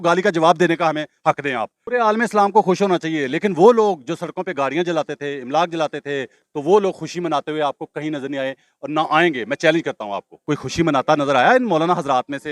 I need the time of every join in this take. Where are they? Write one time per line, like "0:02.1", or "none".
0:01.8
0:06.4
0:10.4